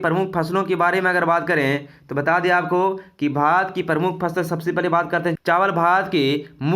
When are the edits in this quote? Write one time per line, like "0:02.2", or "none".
0:05.4